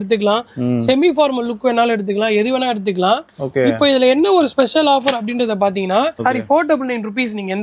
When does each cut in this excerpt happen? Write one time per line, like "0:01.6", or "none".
none